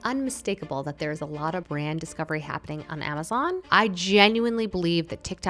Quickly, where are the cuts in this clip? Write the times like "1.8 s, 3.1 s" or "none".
1.7 s, 3.6 s